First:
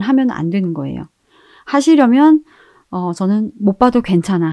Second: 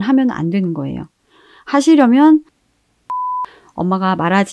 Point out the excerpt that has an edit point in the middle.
second; 1 cut; at 3.1 s

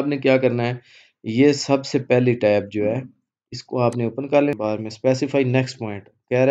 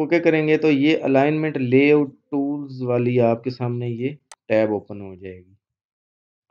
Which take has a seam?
first; 1 cut; at 4.5 s

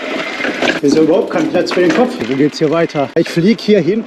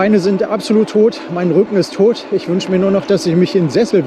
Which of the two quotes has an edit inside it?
first; 3 cuts; at 0.8 s, 2.3 s, 3.2 s

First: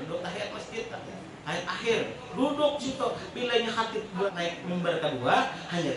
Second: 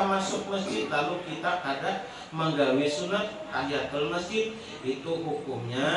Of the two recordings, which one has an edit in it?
first; 1 cut; at 4.3 s

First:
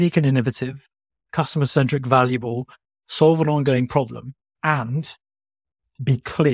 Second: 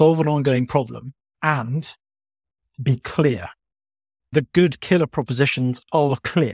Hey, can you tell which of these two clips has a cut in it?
second; 1 cut; at 4.3 s

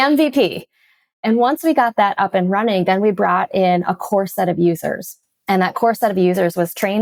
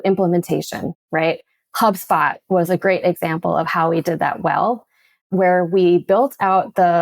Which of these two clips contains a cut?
second; 1 cut; at 1.0 s

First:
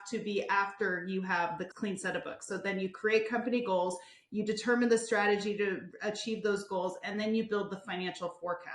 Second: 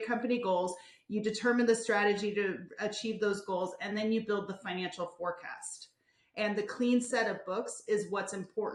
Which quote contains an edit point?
first; 1 cut; at 1.7 s

